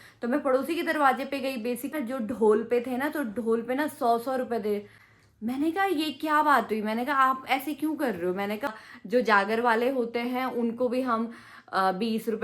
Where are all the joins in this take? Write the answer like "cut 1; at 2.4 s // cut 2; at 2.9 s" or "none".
cut 1; at 1.9 s // cut 2; at 5.0 s // cut 3; at 8.7 s